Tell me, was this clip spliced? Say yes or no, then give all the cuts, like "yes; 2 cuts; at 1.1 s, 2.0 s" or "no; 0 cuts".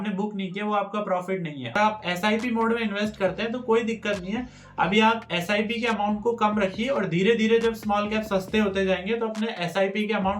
yes; 1 cut; at 1.8 s